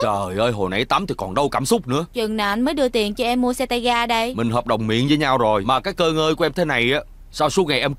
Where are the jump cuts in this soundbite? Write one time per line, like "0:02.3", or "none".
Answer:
0:02.1
0:04.3
0:05.6